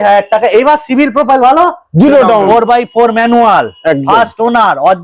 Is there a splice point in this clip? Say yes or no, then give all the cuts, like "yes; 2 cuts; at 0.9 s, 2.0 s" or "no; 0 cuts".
yes; 1 cut; at 2.5 s